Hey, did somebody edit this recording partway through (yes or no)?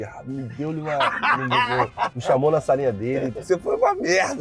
yes